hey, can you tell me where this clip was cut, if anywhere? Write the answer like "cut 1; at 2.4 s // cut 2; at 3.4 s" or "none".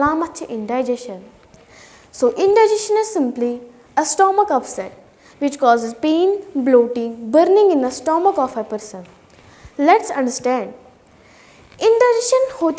none